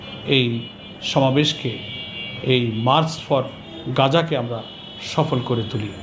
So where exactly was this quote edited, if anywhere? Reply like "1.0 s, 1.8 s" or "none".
none